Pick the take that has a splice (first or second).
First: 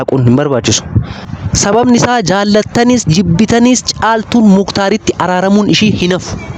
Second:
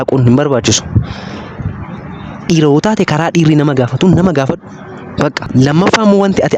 first